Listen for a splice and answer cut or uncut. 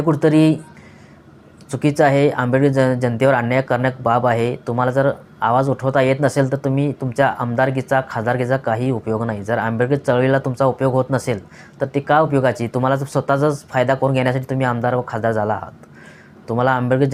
uncut